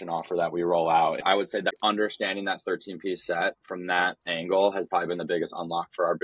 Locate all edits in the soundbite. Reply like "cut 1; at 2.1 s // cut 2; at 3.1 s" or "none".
cut 1; at 1.5 s